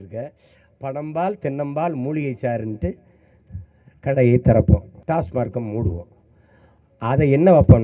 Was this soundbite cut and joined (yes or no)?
yes